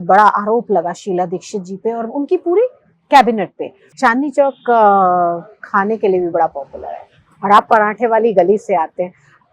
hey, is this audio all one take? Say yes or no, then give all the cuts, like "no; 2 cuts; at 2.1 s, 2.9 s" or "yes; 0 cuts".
no; 1 cut; at 3.9 s